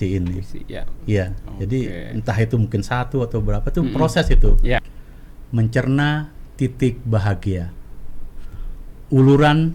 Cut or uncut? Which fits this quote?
cut